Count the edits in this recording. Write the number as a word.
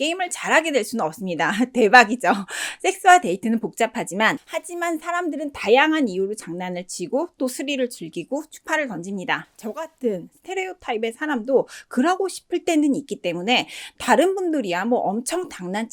zero